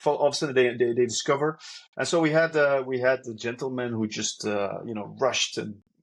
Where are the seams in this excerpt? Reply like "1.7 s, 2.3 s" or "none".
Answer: none